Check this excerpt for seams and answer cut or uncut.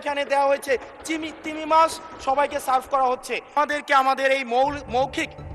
cut